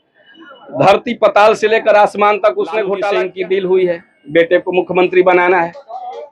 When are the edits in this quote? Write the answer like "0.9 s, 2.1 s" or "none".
3.0 s